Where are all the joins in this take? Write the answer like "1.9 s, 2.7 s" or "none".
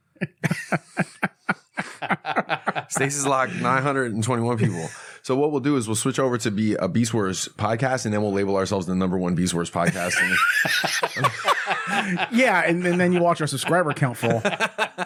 none